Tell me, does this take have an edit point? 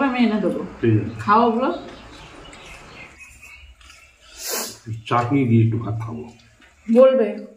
yes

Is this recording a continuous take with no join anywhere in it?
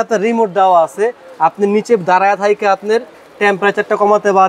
yes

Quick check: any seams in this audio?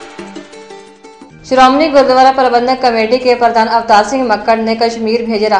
yes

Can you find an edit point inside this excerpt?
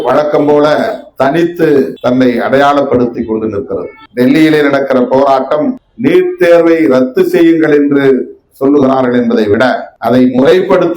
yes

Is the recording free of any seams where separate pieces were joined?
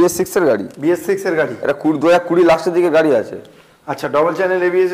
yes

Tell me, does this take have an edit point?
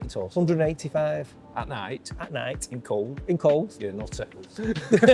no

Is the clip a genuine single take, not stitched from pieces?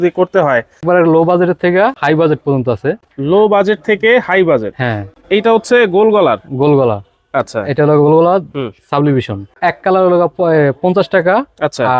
no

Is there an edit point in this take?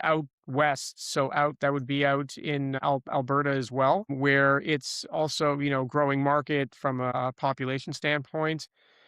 yes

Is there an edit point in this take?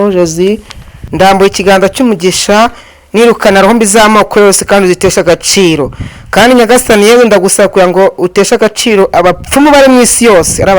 yes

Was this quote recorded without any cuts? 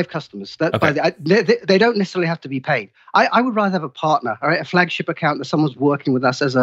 yes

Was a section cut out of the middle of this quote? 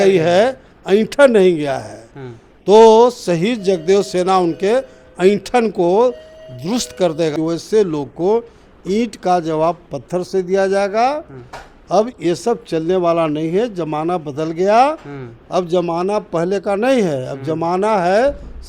yes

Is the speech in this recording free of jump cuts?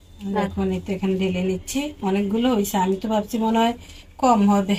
yes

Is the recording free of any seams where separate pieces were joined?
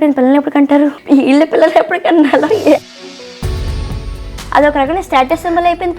no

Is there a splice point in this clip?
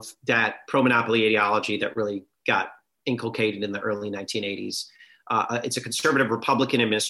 no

